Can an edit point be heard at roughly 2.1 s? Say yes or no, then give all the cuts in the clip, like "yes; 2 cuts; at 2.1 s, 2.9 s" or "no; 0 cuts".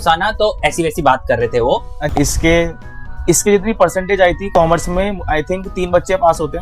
yes; 1 cut; at 2.1 s